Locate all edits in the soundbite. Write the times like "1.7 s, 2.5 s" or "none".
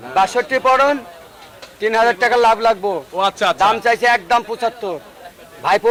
none